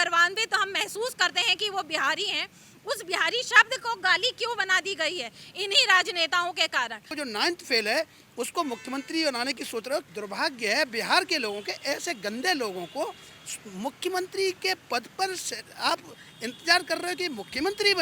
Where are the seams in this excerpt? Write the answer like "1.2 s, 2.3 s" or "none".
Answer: 7.1 s, 10.1 s